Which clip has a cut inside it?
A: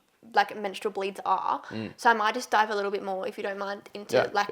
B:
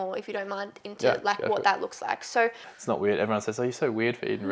B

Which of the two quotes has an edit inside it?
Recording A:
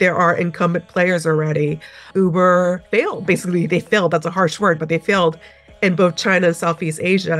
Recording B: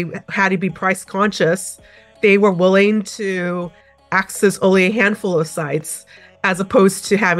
A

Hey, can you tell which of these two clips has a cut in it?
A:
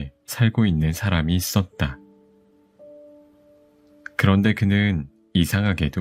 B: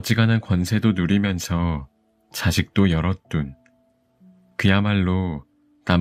A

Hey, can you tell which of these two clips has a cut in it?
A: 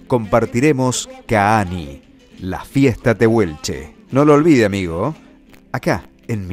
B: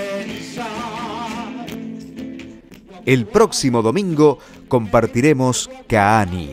B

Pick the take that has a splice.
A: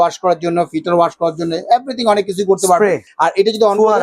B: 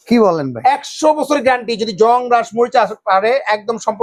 A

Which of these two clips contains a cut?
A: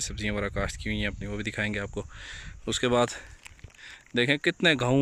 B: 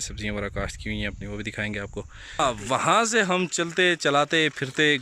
B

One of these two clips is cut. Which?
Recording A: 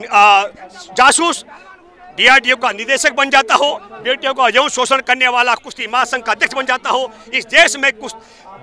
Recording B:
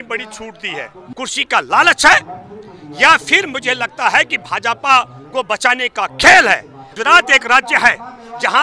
B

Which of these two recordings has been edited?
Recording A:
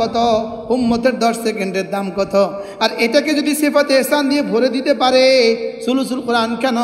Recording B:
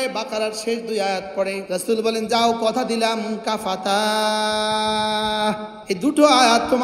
B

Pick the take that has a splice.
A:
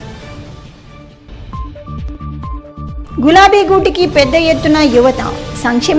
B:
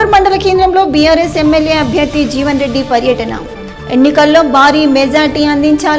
A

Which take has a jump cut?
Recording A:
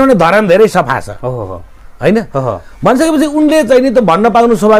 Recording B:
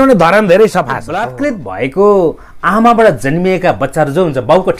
B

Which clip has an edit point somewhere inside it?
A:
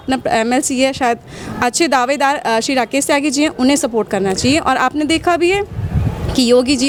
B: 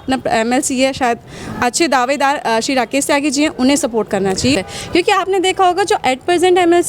B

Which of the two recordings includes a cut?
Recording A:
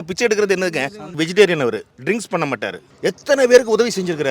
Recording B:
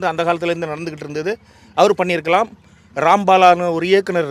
A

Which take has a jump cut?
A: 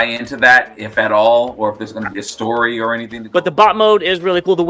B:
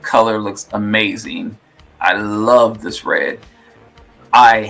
A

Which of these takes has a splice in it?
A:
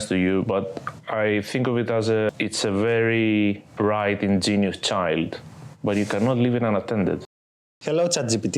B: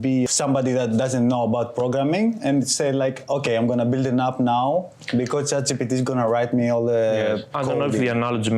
A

